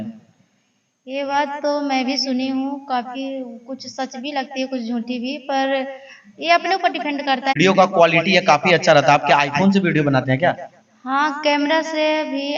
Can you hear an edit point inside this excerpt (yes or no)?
yes